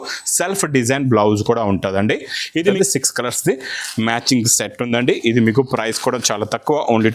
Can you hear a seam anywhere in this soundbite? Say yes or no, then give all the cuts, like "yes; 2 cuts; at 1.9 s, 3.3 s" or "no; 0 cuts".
yes; 1 cut; at 2.7 s